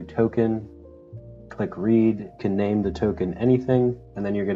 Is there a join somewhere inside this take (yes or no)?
no